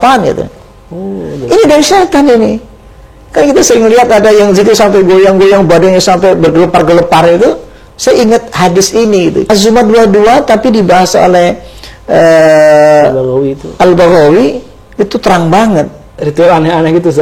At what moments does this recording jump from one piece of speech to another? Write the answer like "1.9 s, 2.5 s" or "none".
9.5 s, 16.2 s